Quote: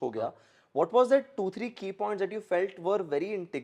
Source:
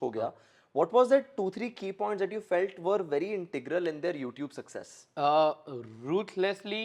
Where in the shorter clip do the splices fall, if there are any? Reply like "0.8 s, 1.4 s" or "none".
none

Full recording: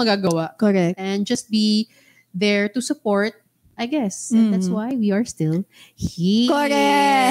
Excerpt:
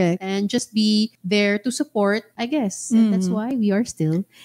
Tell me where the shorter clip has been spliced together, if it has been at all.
1.2 s, 2.3 s

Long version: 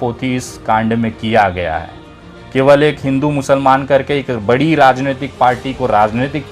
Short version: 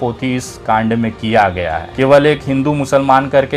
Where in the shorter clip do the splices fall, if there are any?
1.8 s

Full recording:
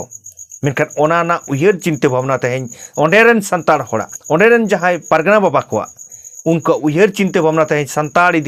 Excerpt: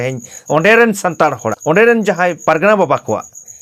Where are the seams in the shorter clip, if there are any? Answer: 1.5 s

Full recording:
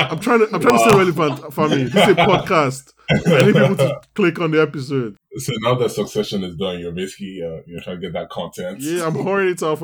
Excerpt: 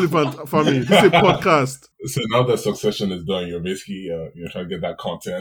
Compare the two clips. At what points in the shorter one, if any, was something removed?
1.9 s

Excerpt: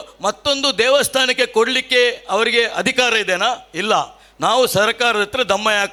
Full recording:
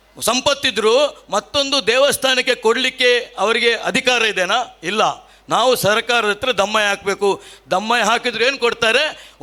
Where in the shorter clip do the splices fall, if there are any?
none

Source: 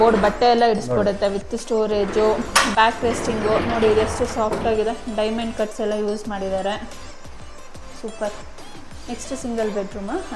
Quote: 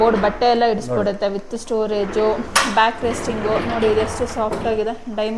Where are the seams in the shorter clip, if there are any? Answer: none

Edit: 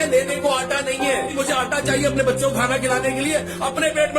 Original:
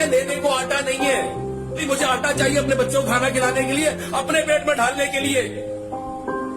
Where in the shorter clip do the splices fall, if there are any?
1.3 s

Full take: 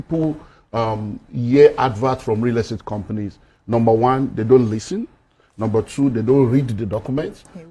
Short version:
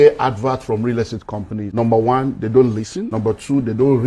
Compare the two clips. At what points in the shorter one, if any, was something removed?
1.7 s, 3.0 s

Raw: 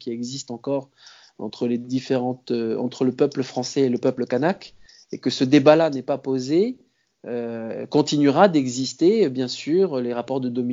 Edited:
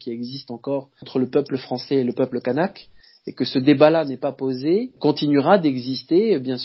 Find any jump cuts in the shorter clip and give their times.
1.1 s, 4.9 s

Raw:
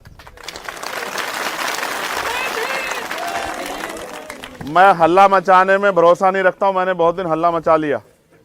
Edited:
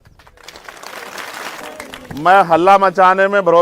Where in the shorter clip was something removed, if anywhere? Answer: 1.6 s

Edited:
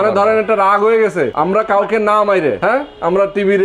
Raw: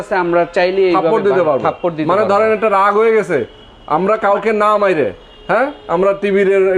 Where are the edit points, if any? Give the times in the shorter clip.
1.3 s, 2.6 s

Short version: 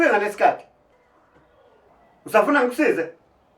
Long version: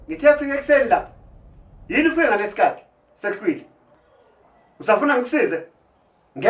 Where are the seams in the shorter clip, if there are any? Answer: 1.0 s

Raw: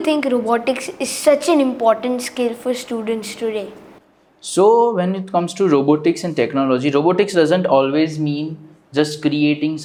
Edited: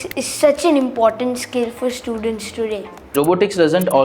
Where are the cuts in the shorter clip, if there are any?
3.1 s

